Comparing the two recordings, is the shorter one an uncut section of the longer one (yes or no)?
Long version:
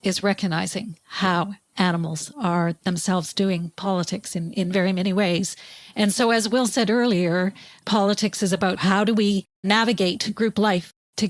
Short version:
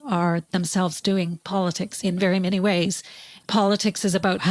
no